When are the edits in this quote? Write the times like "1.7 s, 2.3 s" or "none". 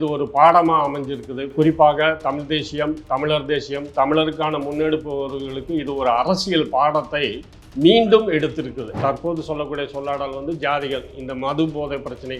8.9 s